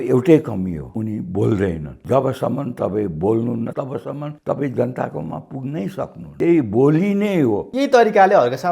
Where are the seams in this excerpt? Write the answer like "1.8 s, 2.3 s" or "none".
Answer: 0.8 s, 1.9 s, 3.8 s, 6.2 s, 7.7 s